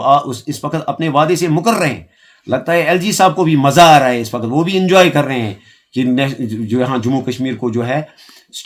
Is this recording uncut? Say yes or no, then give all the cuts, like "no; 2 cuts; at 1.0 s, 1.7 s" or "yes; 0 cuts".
yes; 0 cuts